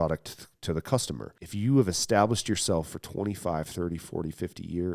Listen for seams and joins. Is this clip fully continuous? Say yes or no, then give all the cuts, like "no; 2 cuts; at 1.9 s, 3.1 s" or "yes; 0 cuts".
no; 1 cut; at 1.4 s